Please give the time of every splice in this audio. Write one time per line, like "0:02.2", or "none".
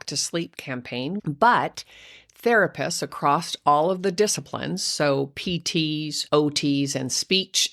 0:01.2
0:06.1